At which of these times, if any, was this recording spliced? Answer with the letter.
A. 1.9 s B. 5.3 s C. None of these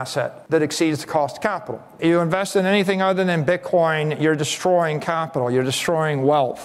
C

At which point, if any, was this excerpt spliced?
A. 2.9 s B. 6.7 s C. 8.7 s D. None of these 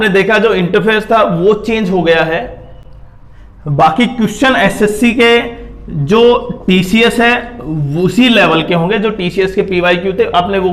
D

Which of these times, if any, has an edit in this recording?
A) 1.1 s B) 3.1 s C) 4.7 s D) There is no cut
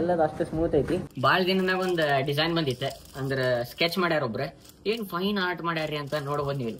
A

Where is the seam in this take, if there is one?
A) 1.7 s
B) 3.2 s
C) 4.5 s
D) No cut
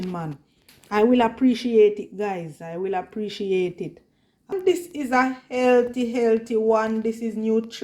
C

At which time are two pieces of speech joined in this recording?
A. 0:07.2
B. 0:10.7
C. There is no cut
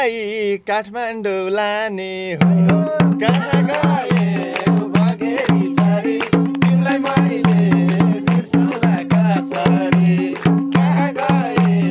C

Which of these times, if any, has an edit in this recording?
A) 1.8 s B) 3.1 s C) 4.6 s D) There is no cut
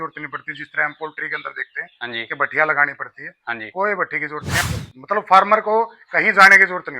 C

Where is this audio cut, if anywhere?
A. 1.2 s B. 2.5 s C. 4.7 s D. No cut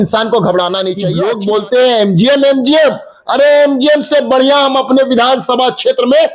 A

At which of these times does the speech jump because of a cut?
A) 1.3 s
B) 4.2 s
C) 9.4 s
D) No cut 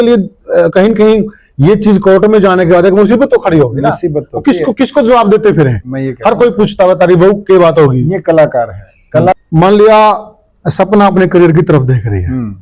C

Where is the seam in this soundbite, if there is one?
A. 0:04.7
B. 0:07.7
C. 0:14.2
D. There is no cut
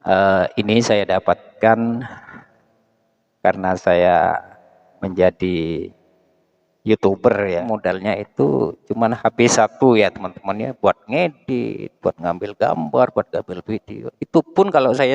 B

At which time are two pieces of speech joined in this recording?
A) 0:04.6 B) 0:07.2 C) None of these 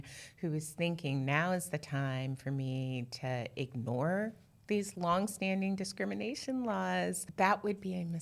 B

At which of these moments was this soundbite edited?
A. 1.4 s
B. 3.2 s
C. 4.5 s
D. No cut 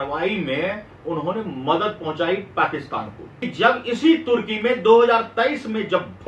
B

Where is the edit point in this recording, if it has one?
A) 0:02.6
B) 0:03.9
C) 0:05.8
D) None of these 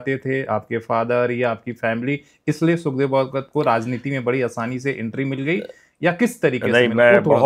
D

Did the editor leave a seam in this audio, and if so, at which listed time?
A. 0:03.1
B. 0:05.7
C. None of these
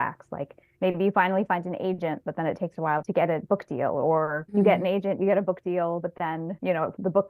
A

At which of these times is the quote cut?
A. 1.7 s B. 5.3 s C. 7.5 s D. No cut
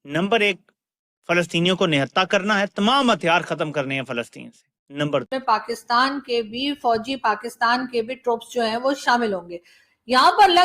B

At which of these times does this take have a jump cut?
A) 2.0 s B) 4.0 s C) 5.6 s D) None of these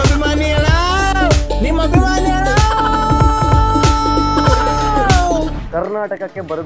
C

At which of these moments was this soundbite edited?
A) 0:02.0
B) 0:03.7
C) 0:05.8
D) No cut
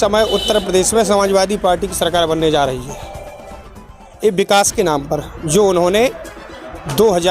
B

